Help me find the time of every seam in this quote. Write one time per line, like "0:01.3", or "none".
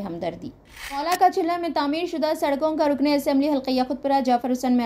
0:00.9